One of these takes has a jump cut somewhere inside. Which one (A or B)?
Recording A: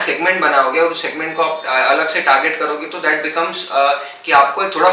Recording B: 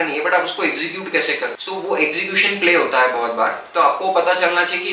B